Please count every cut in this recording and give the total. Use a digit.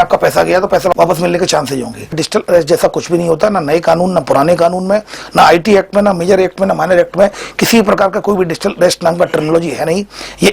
2